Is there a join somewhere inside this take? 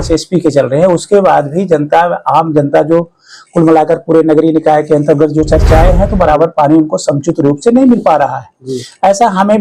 no; 0 cuts

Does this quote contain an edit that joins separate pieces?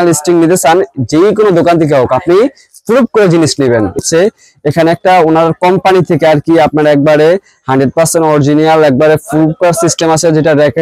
yes; 1 cut; at 4.0 s

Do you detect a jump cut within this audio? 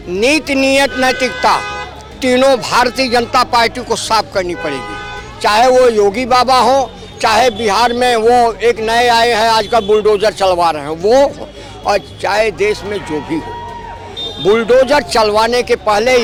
no; 0 cuts

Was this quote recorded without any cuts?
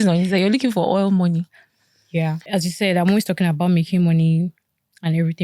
no; 1 cut; at 2.4 s

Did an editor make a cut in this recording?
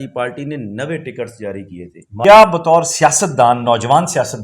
yes; 1 cut; at 2.2 s

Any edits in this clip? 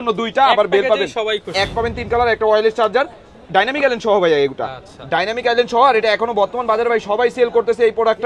yes; 1 cut; at 1.7 s

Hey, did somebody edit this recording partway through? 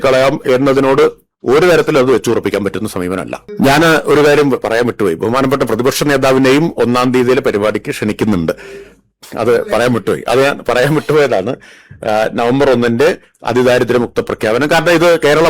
yes; 1 cut; at 3.4 s

